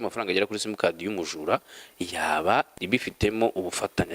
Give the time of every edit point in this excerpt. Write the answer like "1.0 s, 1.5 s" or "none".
2.7 s